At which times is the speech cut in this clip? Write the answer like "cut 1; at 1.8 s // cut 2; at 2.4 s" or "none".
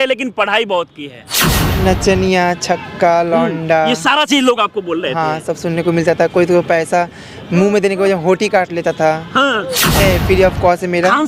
cut 1; at 1.6 s // cut 2; at 10.0 s